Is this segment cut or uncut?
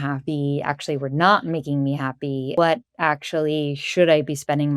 cut